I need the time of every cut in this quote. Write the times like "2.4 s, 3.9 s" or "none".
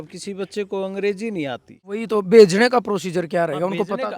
1.7 s